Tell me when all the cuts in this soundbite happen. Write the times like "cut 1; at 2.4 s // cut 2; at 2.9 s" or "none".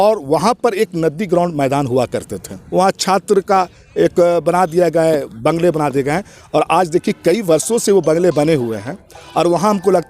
cut 1; at 2.5 s